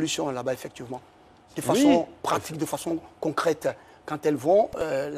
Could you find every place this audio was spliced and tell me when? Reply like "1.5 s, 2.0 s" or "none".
none